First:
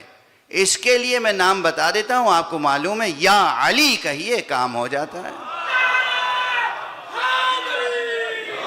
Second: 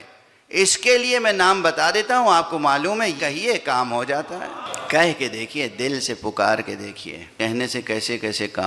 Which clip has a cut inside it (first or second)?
second